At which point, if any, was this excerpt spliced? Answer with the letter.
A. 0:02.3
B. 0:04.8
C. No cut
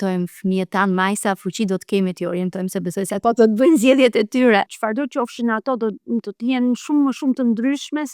B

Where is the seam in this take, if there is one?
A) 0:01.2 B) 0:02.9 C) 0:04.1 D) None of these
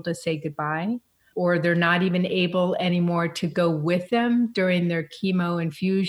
A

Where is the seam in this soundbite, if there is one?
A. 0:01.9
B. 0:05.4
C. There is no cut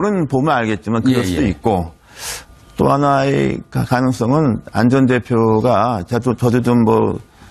B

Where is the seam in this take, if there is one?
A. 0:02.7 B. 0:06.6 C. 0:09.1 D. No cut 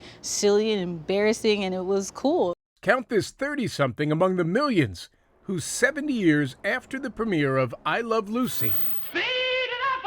A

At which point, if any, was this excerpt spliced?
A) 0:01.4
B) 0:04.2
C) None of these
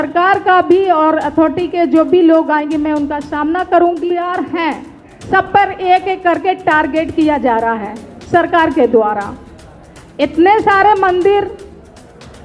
B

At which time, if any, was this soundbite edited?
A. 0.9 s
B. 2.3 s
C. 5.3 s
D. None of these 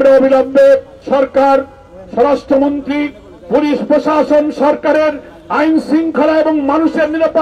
A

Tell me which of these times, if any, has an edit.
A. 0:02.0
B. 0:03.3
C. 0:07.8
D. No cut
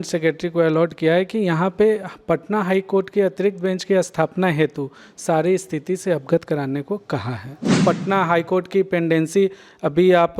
C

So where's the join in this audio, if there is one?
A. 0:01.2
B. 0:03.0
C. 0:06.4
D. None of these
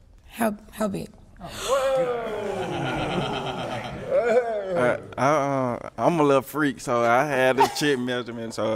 B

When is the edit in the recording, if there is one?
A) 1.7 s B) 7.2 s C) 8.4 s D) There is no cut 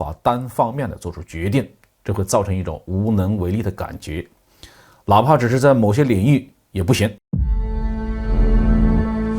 B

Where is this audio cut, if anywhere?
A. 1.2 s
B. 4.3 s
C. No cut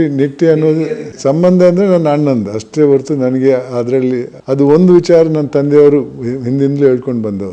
B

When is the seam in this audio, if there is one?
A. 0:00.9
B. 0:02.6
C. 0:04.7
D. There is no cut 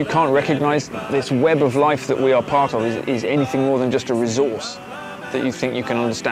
A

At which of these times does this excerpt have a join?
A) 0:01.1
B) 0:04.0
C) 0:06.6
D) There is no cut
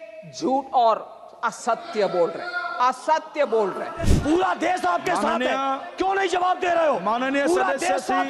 B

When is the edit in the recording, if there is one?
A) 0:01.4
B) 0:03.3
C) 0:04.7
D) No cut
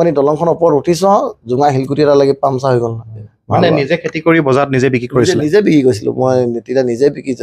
B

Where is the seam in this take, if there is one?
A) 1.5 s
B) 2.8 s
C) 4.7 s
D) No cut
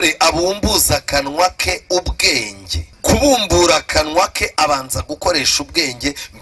B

